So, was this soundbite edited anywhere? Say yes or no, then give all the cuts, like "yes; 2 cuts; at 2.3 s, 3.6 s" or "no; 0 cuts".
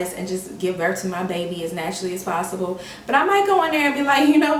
no; 0 cuts